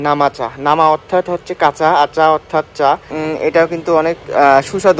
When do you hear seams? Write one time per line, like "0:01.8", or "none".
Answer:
0:03.1